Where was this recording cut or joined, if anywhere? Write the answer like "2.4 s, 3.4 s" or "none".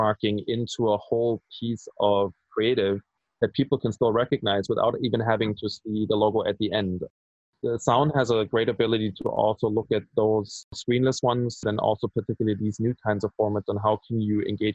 10.7 s, 11.6 s